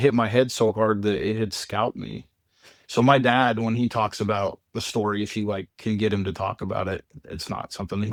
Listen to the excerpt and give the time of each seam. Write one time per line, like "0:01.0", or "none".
none